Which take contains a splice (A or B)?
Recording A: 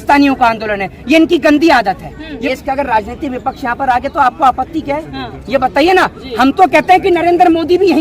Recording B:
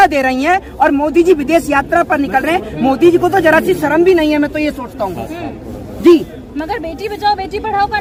A